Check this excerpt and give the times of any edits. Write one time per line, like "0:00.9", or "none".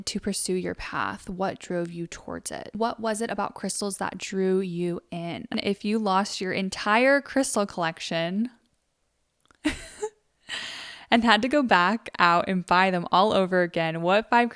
0:02.8
0:05.6